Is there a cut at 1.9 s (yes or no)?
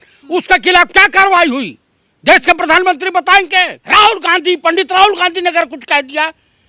no